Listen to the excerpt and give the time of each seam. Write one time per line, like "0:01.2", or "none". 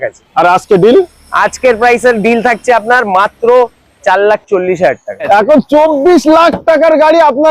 0:05.2